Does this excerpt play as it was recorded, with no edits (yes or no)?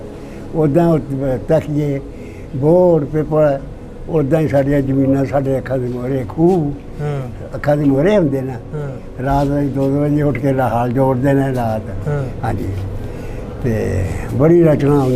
yes